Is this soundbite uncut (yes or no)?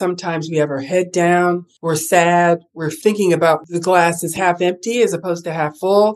no